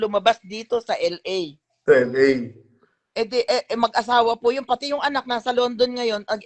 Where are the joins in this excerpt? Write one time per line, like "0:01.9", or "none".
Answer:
none